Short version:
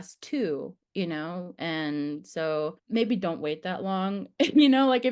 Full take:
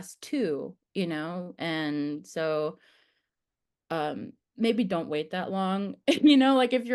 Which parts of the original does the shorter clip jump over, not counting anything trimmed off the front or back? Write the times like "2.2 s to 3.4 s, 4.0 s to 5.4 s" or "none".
2.8 s to 4.5 s